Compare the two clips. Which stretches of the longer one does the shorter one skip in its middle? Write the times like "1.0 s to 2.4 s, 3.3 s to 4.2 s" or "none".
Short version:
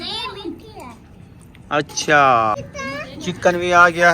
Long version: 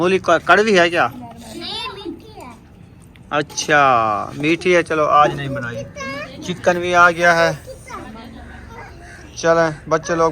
4.3 s to 5.9 s